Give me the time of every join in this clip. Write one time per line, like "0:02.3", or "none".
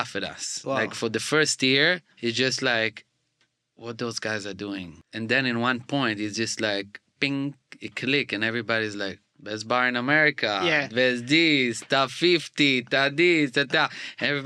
0:02.1
0:05.0
0:09.3